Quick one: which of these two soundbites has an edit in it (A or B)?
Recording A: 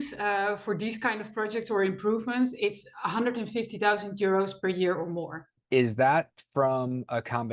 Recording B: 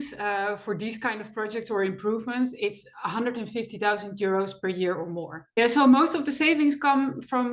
B